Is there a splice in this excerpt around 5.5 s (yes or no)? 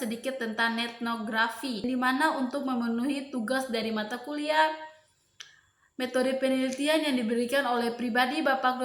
no